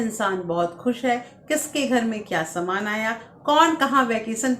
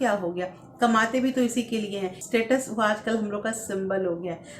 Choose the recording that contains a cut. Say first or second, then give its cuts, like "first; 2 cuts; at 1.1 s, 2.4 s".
second; 1 cut; at 2.2 s